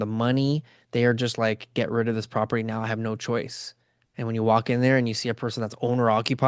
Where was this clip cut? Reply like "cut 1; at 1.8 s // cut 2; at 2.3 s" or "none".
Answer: none